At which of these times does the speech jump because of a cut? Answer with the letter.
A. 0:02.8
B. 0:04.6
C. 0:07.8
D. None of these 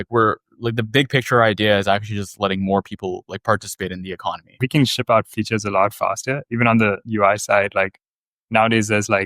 B